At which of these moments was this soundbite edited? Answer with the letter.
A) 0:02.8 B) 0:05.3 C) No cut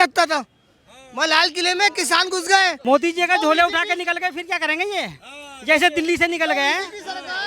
A